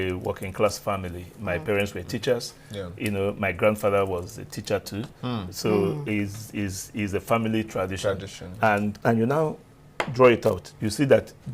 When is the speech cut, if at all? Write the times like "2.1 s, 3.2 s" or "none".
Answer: 9.0 s

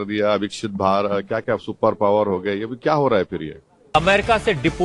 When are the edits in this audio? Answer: 3.9 s

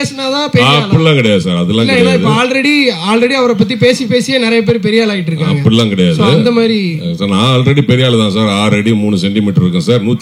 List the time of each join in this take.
none

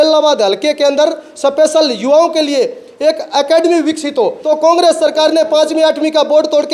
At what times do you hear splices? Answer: 4.4 s

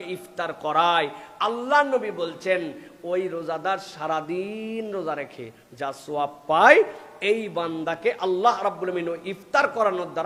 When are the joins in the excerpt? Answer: none

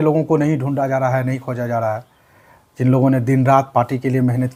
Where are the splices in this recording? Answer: none

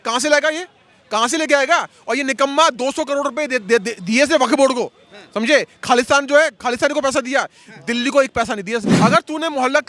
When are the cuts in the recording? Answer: 8.9 s

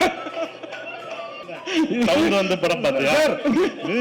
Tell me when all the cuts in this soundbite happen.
1.4 s

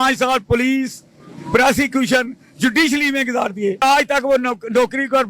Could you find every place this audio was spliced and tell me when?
3.8 s

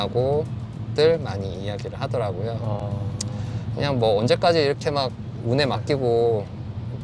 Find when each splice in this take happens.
none

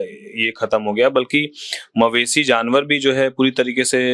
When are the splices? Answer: none

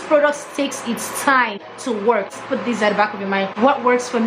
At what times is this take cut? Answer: 2.3 s

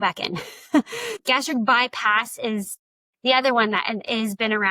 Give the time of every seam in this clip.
1.2 s

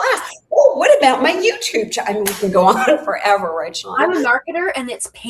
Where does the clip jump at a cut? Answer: none

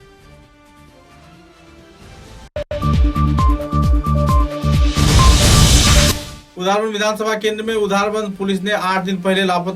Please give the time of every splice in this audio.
2.6 s, 6.1 s

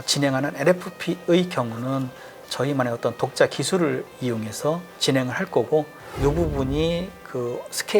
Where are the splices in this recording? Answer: 4.9 s, 6.0 s

